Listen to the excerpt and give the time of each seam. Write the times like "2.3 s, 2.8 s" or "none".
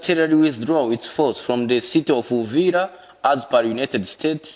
none